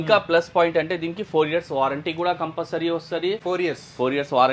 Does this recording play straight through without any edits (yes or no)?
yes